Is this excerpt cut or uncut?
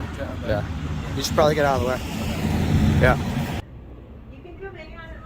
cut